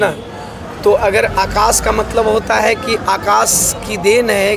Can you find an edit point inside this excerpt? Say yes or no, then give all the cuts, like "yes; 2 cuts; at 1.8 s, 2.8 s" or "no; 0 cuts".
no; 0 cuts